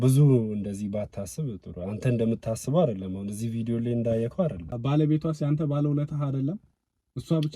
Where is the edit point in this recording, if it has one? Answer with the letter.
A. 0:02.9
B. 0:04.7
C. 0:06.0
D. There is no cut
B